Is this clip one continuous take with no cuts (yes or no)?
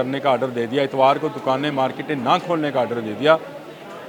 yes